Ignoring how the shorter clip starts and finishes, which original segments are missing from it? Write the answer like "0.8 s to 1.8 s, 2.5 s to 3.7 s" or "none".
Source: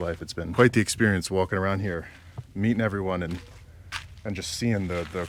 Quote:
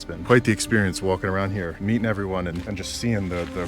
2.0 s to 2.5 s, 3.4 s to 4.2 s